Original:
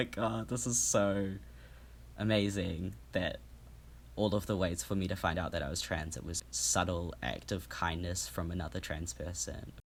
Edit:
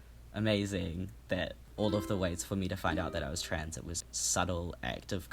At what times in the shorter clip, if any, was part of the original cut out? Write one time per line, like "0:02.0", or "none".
0:01.6